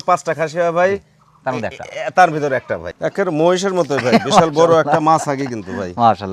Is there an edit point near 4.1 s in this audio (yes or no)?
no